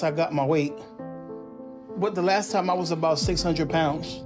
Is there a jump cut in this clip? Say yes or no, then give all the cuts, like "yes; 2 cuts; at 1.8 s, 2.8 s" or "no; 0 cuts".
no; 0 cuts